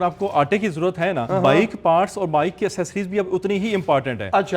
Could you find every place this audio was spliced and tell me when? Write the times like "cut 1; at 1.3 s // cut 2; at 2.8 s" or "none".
cut 1; at 1.2 s